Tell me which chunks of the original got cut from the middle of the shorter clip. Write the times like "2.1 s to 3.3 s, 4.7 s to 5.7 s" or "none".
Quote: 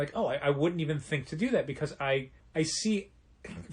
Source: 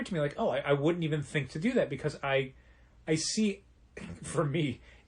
2.6 s to 2.9 s